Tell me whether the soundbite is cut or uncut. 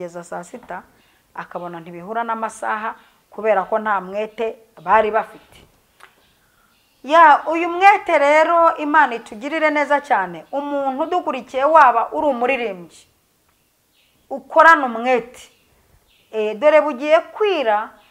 uncut